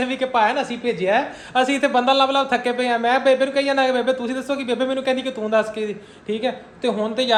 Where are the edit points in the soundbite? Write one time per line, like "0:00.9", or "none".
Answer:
none